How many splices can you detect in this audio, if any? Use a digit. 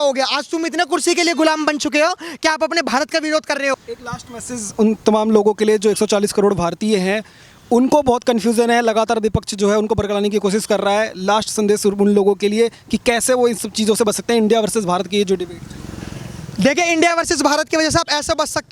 0